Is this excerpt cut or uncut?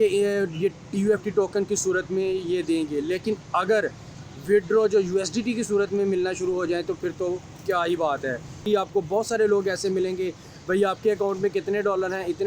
cut